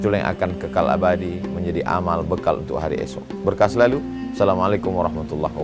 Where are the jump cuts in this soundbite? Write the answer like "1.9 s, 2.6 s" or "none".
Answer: none